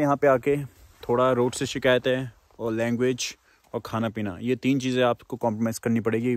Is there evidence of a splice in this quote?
no; 0 cuts

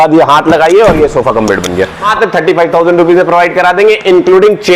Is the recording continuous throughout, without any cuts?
no; 1 cut; at 2.1 s

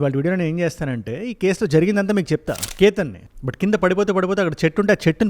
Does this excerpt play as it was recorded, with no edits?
no; 1 cut; at 2.6 s

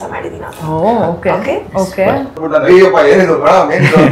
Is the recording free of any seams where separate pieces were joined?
no; 1 cut; at 2.4 s

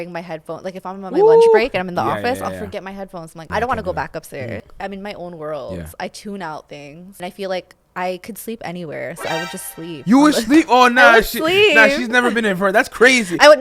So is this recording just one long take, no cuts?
no; 3 cuts; at 3.4 s, 4.7 s, 7.2 s

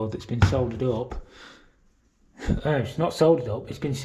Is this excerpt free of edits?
yes; 0 cuts

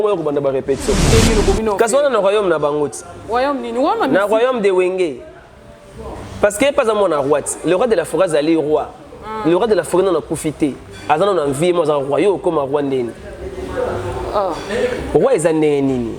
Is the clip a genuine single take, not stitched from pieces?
no; 1 cut; at 1.1 s

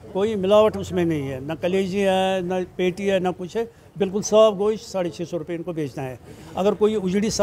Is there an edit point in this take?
no; 0 cuts

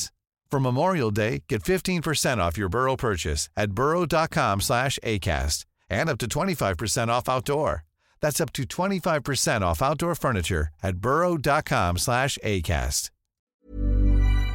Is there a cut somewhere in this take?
yes; 1 cut; at 13.5 s

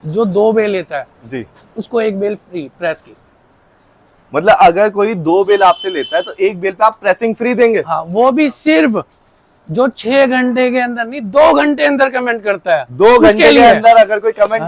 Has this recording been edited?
no; 0 cuts

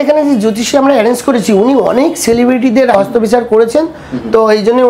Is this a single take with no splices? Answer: no; 1 cut; at 2.9 s

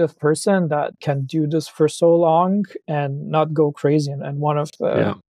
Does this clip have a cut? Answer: yes; 1 cut; at 1.0 s

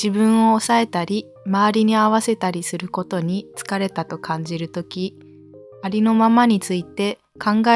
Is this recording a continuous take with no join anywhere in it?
yes; 0 cuts

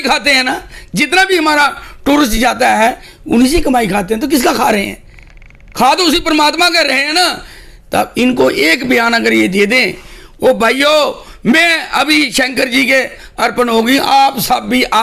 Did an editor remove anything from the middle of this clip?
no; 0 cuts

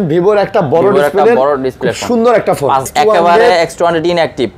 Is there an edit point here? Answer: yes; 1 cut; at 2.9 s

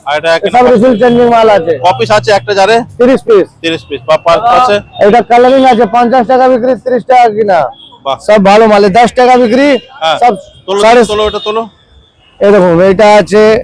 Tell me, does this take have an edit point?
no; 0 cuts

